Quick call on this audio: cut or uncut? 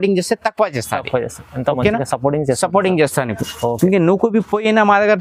uncut